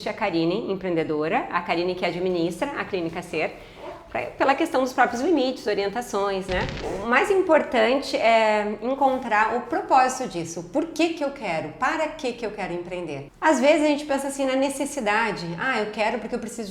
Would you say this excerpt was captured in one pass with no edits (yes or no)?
no